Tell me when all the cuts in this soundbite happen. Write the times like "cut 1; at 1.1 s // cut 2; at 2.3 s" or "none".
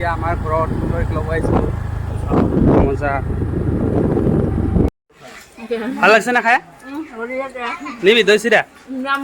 cut 1; at 5.0 s